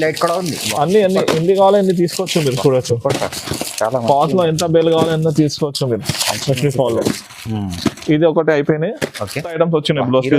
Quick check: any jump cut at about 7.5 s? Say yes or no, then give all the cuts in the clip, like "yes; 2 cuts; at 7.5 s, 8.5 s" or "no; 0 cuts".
no; 1 cut; at 9.5 s